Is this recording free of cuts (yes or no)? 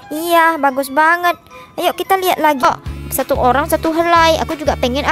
no